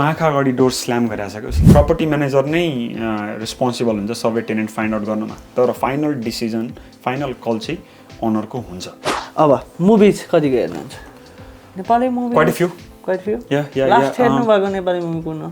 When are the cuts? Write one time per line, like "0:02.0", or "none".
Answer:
0:01.7
0:09.1